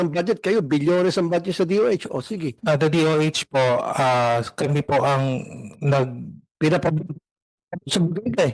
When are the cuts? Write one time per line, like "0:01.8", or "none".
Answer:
none